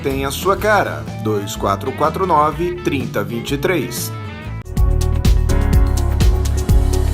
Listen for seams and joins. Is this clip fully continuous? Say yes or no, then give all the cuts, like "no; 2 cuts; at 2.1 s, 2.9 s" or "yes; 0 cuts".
no; 1 cut; at 4.6 s